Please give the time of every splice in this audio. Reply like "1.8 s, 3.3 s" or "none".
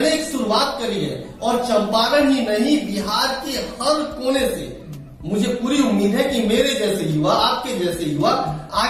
none